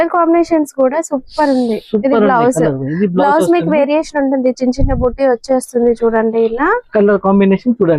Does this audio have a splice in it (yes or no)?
no